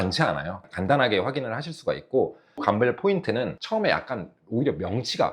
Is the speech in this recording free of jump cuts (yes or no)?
no